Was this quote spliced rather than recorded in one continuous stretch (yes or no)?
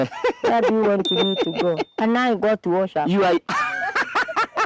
yes